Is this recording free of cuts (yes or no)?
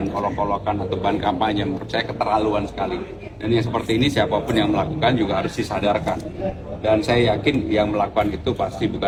yes